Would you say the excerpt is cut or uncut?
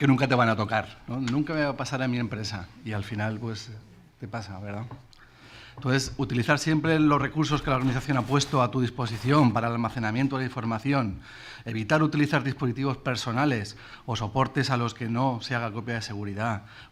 uncut